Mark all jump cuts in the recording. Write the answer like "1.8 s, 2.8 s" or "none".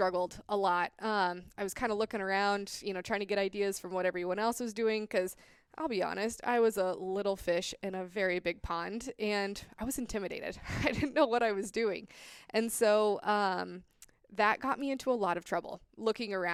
none